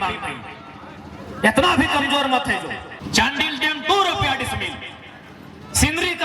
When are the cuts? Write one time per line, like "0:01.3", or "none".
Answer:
0:02.9